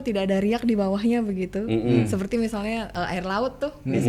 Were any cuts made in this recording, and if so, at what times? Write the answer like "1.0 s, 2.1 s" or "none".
2.9 s

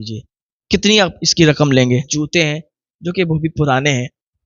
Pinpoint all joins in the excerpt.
2.1 s

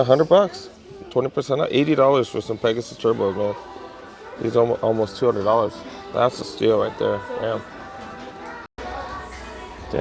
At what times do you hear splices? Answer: none

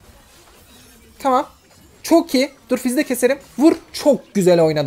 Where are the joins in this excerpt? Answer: none

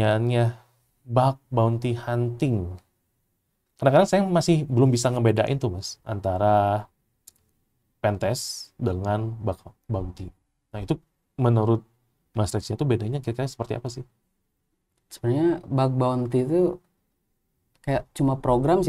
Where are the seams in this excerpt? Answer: none

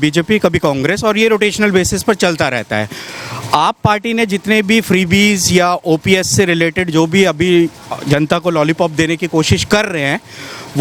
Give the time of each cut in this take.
none

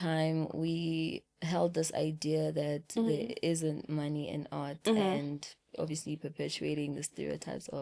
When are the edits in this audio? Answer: none

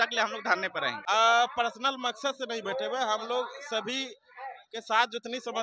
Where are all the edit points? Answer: 1.0 s

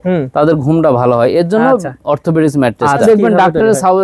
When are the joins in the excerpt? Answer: 3.0 s

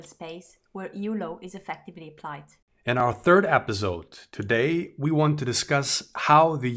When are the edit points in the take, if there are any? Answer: 3.0 s

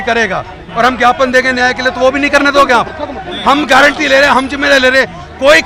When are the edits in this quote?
none

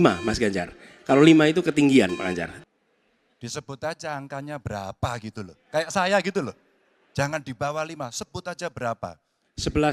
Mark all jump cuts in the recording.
2.5 s

